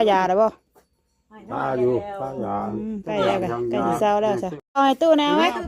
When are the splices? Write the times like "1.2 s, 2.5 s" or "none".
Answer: 4.8 s